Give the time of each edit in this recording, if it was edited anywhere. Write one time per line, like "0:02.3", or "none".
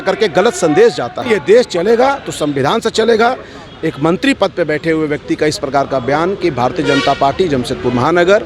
0:01.2